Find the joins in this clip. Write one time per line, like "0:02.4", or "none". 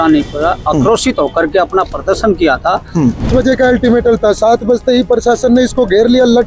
0:03.3